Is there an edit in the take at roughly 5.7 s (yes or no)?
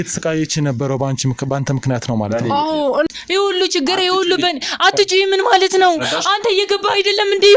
no